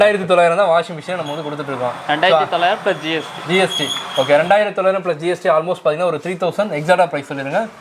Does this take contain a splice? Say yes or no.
no